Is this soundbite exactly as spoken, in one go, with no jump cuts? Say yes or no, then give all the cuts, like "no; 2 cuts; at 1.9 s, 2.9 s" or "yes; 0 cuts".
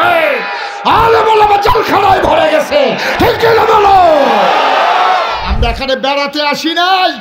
no; 1 cut; at 5.5 s